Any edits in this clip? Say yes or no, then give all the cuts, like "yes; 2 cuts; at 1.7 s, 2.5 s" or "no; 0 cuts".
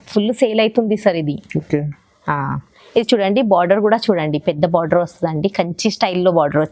no; 0 cuts